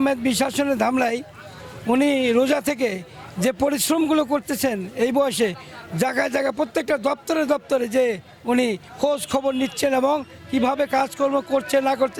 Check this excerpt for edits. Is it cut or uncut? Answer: uncut